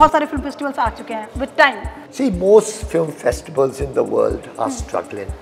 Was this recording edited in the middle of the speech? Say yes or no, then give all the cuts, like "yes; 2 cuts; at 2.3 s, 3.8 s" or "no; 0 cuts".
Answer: yes; 1 cut; at 2.0 s